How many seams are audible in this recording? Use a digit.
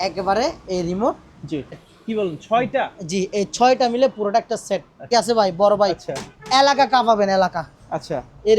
2